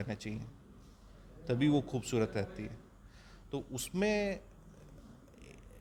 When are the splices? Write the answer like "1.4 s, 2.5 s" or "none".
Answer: none

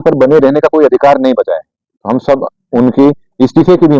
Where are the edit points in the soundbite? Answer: none

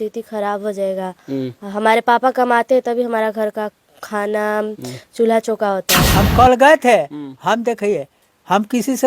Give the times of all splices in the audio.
6.0 s

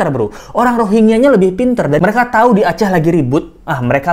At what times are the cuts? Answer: 2.0 s

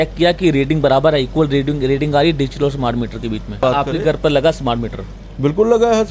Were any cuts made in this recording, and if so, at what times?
3.6 s

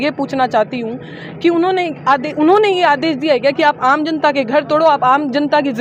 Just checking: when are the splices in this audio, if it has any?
none

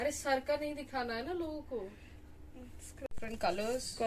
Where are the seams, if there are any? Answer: 2.9 s

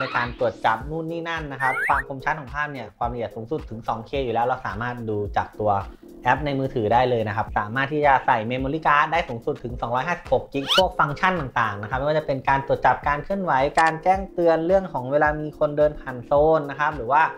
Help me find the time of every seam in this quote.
1.8 s, 7.4 s, 10.7 s

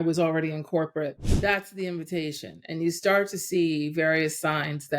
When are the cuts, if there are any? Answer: 1.2 s

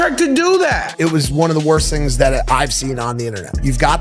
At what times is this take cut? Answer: 0.9 s

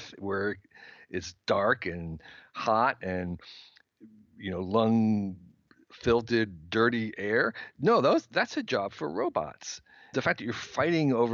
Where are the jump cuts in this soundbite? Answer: 10.1 s

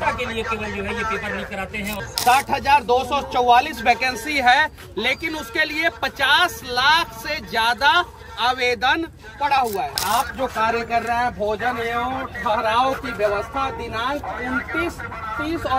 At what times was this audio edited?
1.9 s, 10.0 s

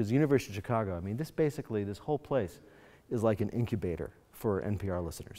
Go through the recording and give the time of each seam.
none

